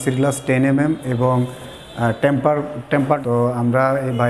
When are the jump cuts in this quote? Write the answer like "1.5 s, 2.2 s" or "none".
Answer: 3.2 s